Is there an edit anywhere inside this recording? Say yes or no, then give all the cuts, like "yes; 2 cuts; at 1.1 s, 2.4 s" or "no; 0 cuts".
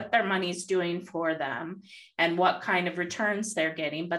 no; 0 cuts